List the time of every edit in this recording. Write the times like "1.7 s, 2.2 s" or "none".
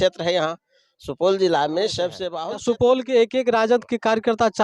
2.2 s